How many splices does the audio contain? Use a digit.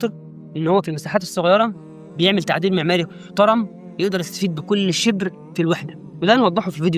0